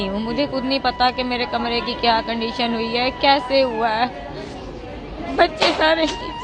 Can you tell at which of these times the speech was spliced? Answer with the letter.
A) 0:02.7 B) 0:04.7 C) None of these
C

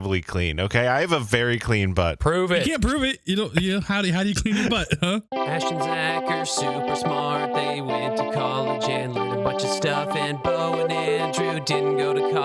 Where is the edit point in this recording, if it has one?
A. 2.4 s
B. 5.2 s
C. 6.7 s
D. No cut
B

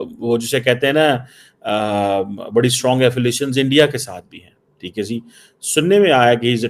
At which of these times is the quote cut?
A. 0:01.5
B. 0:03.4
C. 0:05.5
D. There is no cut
D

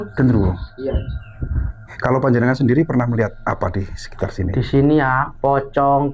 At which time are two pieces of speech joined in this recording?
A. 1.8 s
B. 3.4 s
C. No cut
A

